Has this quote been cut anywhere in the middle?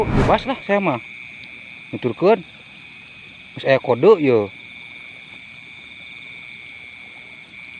yes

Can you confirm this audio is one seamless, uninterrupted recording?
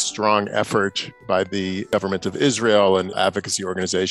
no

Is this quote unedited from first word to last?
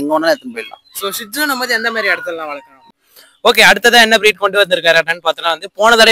no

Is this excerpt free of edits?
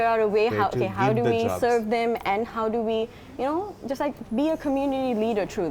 yes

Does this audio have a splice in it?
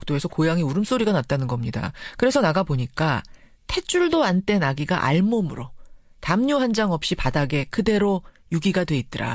yes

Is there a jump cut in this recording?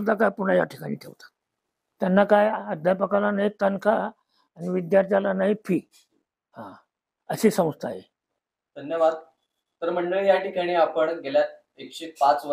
no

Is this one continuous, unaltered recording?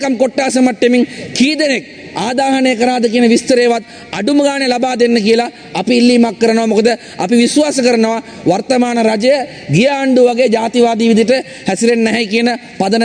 yes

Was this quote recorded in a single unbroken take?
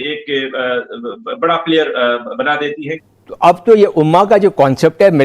no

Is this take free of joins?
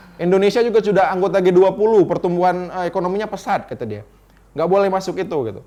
yes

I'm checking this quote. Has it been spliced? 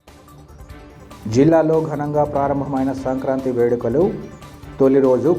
no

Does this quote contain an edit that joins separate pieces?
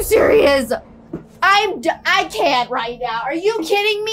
no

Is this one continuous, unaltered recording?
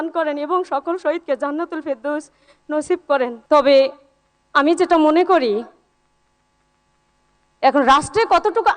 no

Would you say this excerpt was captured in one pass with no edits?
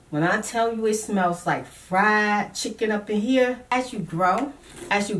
no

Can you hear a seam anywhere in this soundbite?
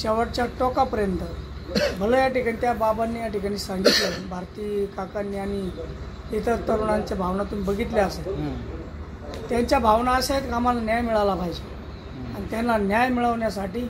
no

